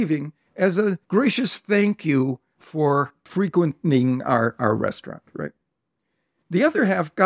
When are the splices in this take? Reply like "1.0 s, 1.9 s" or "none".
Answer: 1.0 s, 3.2 s